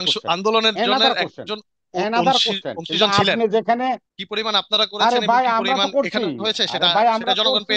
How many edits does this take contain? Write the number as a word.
one